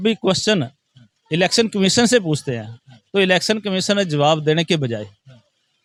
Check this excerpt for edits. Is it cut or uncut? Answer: uncut